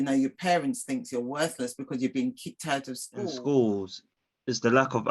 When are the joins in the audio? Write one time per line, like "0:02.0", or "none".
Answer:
0:03.2